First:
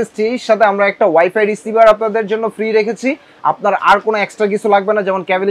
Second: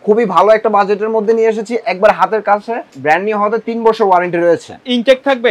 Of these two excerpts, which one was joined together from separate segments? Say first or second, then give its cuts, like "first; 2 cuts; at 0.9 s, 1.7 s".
second; 1 cut; at 2.9 s